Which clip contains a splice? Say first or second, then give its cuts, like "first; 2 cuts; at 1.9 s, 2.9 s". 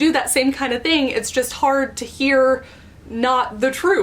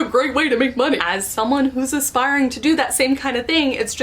second; 1 cut; at 1.0 s